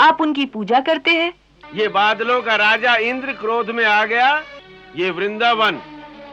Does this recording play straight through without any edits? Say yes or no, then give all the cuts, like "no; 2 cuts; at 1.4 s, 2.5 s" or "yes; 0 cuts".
no; 2 cuts; at 1.6 s, 4.9 s